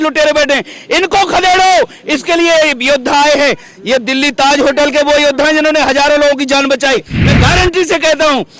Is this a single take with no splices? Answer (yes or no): no